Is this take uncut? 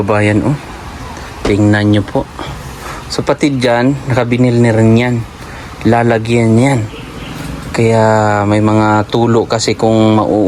yes; 0 cuts

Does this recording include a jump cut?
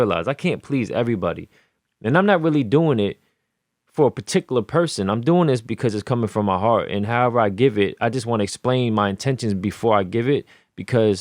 no; 0 cuts

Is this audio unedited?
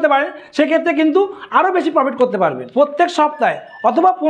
no; 1 cut; at 2.6 s

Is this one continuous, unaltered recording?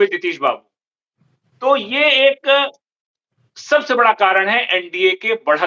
yes; 0 cuts

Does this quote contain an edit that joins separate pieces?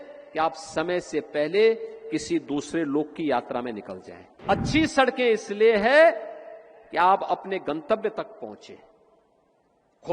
yes; 1 cut; at 4.4 s

